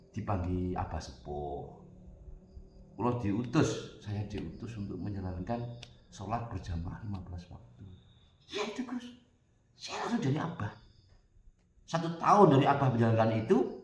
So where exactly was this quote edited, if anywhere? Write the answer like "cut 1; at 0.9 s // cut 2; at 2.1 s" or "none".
none